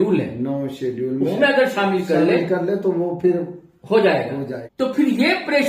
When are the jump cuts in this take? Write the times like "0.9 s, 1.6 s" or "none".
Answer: 4.6 s